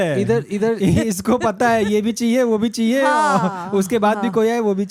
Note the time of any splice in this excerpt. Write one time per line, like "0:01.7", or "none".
none